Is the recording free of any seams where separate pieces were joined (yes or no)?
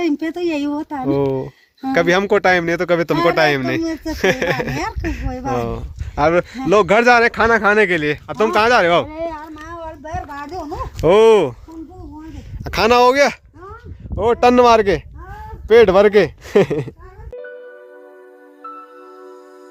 yes